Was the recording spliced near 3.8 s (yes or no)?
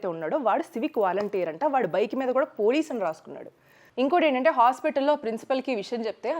yes